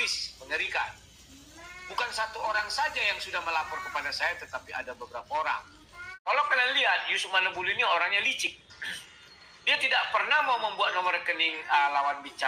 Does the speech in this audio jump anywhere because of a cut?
yes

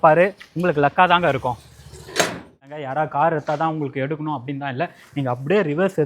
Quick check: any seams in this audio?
yes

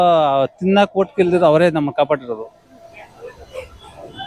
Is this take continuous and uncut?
yes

